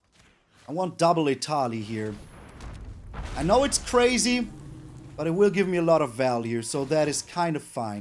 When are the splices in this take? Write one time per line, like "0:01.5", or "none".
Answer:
none